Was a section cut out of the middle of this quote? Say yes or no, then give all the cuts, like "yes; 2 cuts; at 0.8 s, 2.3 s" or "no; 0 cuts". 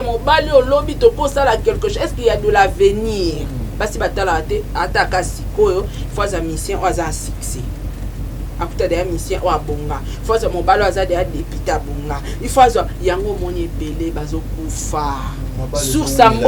yes; 1 cut; at 15.6 s